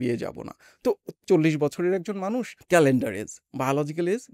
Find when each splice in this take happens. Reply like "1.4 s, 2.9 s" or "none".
1.1 s